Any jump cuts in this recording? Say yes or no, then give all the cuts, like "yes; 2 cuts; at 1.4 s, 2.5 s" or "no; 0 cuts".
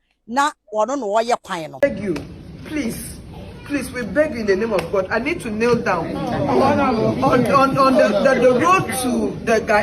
yes; 1 cut; at 1.7 s